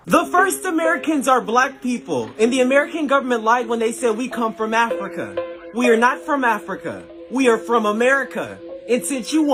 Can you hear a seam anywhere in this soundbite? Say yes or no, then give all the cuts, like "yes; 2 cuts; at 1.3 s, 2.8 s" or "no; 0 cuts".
no; 0 cuts